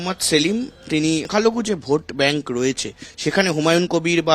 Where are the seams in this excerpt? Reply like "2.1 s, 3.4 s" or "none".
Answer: 1.2 s